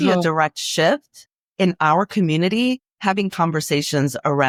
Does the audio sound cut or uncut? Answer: uncut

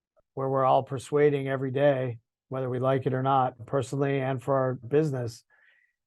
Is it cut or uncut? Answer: cut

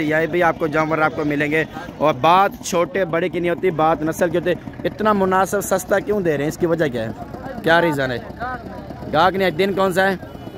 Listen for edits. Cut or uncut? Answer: uncut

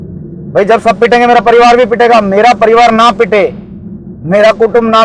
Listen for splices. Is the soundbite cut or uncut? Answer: uncut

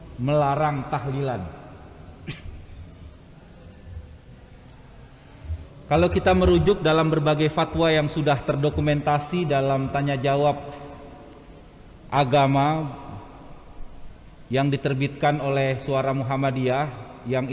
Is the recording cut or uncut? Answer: uncut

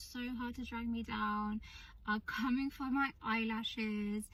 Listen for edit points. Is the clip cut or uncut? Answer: uncut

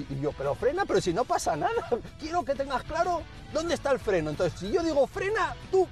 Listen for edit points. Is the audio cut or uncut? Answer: uncut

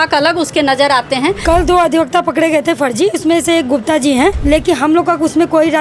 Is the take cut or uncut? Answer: cut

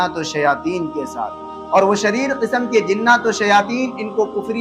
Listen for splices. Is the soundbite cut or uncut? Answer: uncut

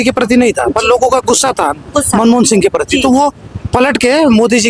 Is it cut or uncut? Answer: uncut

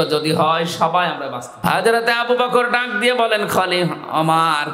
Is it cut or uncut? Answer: cut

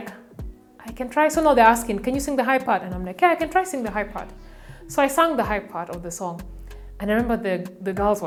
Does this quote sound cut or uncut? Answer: uncut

